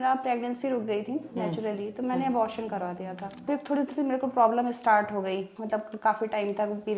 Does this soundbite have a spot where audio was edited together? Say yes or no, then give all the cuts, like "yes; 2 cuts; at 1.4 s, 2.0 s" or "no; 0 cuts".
yes; 2 cuts; at 3.4 s, 5.5 s